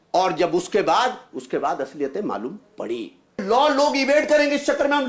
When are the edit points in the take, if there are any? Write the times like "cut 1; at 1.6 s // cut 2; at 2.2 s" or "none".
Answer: cut 1; at 3.4 s